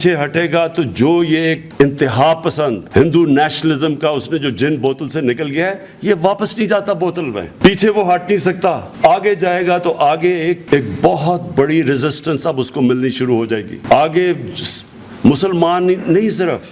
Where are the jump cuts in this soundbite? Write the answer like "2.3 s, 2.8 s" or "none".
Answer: none